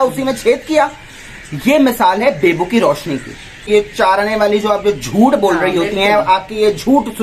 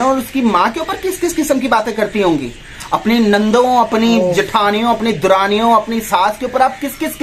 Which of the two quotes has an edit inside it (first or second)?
first